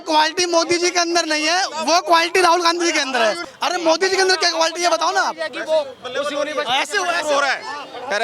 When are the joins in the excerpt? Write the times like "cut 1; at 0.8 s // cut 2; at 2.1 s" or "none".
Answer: cut 1; at 3.4 s